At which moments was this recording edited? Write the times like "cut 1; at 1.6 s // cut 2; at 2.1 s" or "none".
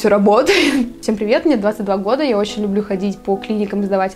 cut 1; at 1.0 s